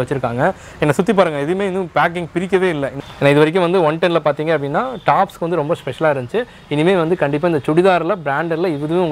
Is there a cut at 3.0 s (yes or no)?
yes